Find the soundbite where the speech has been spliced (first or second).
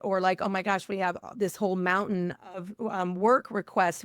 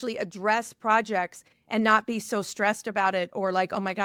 first